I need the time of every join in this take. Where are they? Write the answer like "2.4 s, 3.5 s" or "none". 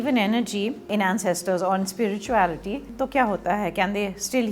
0.9 s, 3.0 s